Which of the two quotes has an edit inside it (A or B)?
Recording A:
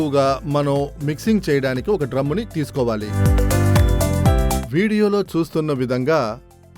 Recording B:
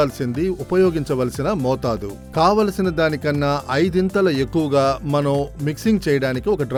A